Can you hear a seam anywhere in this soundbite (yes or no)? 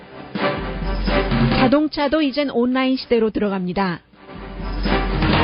yes